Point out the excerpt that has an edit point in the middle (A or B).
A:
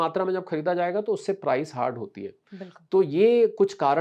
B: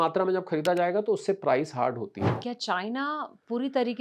B